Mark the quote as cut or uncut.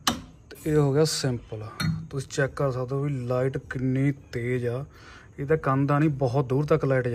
uncut